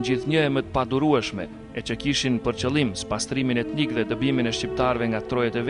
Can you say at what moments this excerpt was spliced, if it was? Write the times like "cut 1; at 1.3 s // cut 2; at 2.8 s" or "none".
cut 1; at 2.9 s